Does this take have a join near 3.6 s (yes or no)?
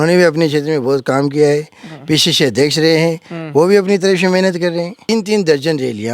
no